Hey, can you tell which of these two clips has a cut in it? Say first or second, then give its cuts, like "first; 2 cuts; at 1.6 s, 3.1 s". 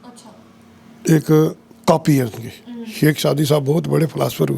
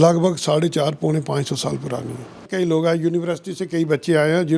second; 1 cut; at 2.5 s